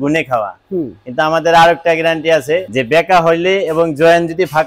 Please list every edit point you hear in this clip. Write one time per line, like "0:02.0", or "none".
0:02.7

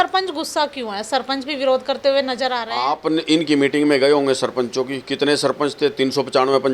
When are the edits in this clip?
0:02.7

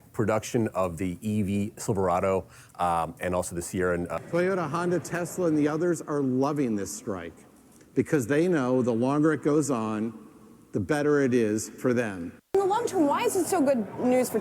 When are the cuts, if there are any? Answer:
0:04.1
0:12.5

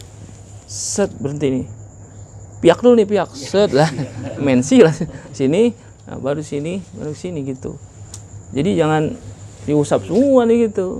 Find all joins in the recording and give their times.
none

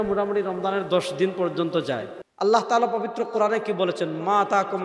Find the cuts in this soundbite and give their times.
0:02.2

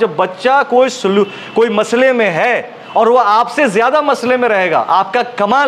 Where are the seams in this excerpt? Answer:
none

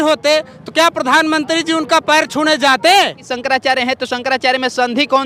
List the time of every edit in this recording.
0:03.3

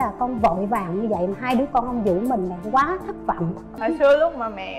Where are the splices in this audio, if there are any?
0:03.7

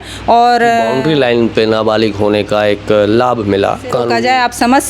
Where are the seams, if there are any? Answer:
0:00.9
0:04.1

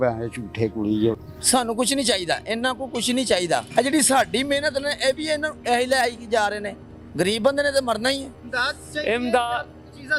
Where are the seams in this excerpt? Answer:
0:01.3
0:08.4

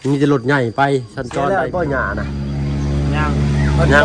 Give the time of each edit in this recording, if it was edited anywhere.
0:01.2

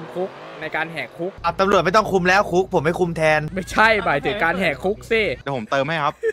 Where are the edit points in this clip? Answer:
0:01.4
0:03.6
0:05.4

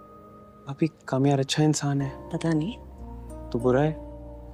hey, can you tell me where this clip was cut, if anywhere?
none

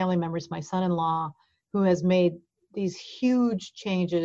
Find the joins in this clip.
none

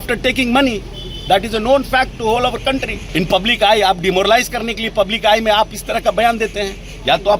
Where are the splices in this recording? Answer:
0:03.0

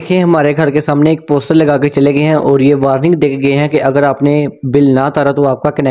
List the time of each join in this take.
none

